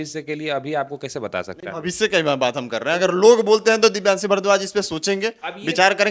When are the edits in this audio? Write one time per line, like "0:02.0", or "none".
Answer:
none